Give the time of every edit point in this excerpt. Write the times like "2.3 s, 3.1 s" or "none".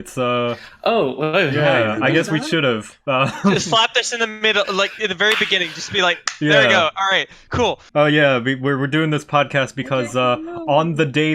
7.8 s

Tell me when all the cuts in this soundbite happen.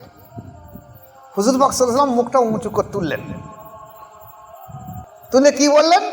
5.1 s

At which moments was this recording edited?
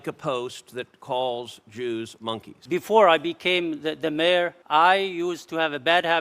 2.5 s, 4.6 s

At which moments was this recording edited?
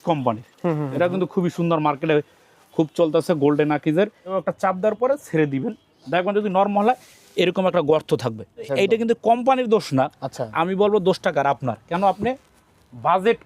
4.2 s, 8.8 s

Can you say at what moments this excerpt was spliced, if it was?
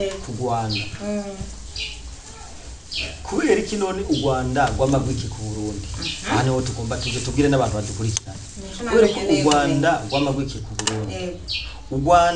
none

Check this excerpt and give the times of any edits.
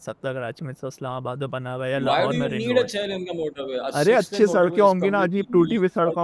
none

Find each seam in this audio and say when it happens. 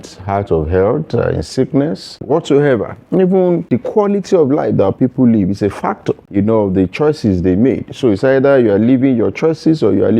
2.2 s, 3.7 s, 6.2 s

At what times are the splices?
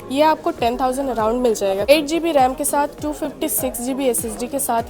1.9 s

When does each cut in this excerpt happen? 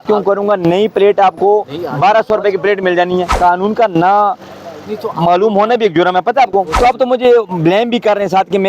3.3 s, 6.7 s

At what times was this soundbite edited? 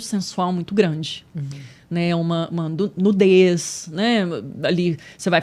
none

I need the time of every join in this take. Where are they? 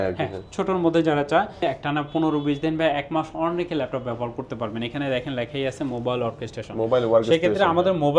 1.6 s

